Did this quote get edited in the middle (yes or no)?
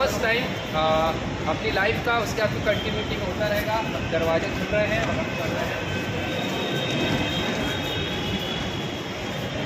no